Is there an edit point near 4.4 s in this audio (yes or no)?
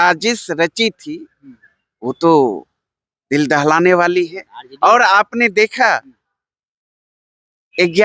no